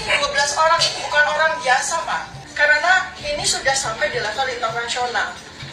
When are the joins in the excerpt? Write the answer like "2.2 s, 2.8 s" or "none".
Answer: 2.4 s